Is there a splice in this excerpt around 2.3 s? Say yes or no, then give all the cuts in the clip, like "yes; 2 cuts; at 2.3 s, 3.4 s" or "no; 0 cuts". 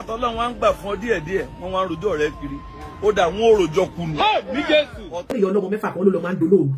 no; 1 cut; at 5.4 s